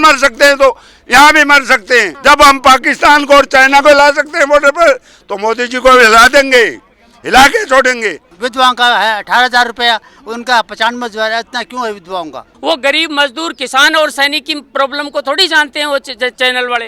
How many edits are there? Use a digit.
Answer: 3